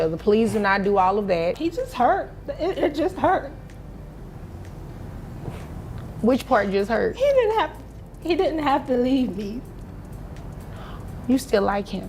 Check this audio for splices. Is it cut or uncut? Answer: cut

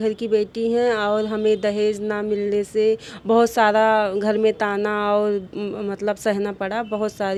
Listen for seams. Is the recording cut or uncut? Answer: uncut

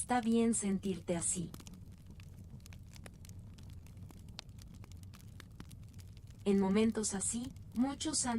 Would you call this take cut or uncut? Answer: cut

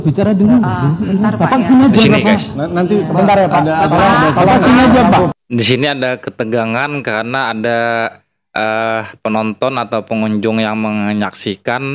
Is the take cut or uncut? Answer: uncut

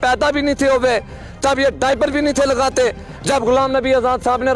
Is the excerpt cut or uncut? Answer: uncut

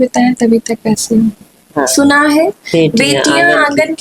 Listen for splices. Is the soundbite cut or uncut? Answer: cut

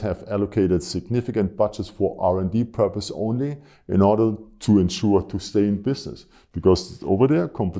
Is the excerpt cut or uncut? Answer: uncut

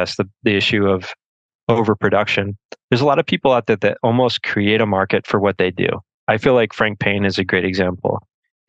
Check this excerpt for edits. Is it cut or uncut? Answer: cut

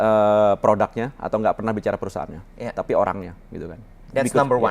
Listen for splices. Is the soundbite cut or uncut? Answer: uncut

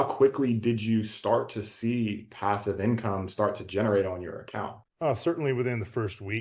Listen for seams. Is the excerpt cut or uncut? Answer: uncut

